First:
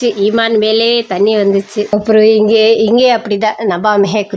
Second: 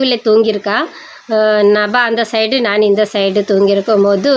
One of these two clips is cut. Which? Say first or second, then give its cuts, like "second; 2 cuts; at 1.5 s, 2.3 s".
first; 1 cut; at 1.9 s